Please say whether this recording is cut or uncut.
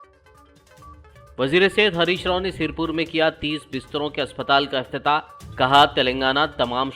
uncut